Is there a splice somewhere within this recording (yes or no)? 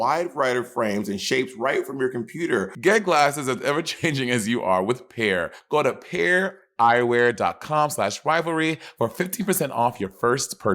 yes